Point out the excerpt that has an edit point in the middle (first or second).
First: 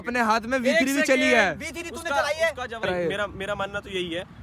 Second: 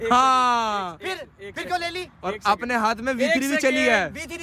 first